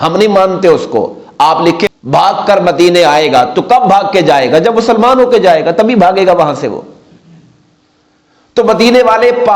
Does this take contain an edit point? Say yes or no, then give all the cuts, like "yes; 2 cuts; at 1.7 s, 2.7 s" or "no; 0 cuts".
yes; 1 cut; at 1.9 s